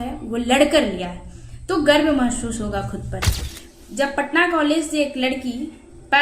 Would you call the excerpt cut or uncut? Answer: cut